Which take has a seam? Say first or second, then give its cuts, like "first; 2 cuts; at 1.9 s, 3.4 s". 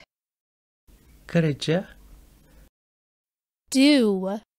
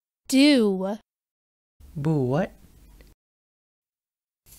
second; 2 cuts; at 2.2 s, 3.1 s